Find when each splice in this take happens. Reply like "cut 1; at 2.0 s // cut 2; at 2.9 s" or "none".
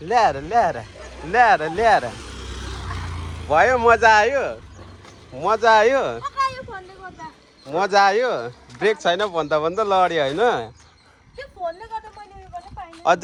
none